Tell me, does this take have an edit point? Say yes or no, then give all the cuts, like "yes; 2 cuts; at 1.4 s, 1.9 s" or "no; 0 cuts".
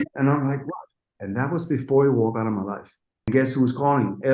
yes; 1 cut; at 3.3 s